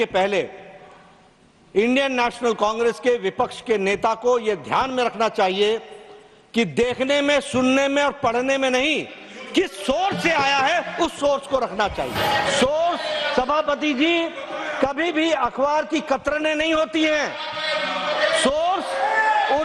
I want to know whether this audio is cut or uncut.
cut